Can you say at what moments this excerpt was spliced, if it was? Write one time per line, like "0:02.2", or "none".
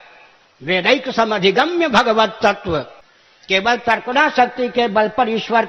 0:02.9